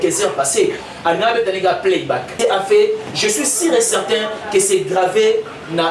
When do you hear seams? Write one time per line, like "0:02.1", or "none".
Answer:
0:02.3